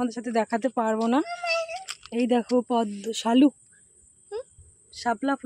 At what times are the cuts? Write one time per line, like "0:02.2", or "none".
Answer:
none